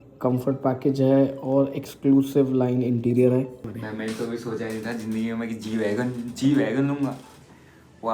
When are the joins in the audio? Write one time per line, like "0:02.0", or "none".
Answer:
0:03.7